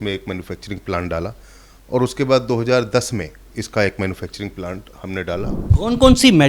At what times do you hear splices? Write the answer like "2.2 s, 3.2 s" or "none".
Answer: 5.6 s